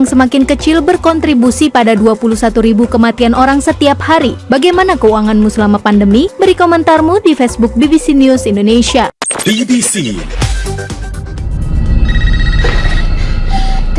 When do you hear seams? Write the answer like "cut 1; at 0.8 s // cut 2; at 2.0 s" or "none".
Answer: cut 1; at 9.2 s // cut 2; at 11.0 s